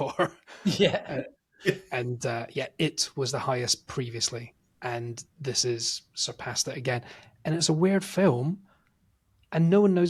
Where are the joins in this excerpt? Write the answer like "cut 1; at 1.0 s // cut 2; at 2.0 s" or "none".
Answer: none